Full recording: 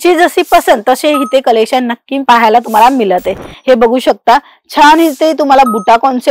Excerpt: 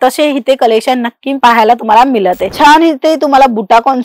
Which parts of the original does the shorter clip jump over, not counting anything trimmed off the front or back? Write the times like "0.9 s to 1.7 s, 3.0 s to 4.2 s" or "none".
3.3 s to 4.6 s